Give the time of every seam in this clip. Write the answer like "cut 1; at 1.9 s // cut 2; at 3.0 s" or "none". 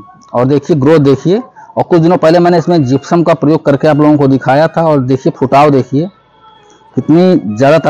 none